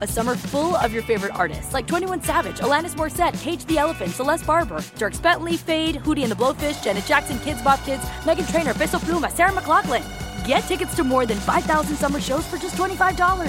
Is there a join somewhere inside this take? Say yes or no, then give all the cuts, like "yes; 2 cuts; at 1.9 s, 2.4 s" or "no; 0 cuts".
no; 0 cuts